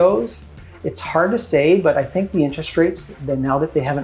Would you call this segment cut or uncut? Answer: uncut